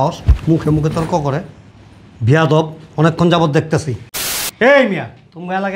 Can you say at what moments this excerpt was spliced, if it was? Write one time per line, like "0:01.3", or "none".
0:04.3